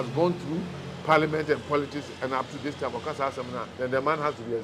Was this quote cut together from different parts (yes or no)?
yes